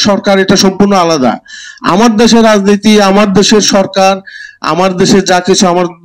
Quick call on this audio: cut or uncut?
uncut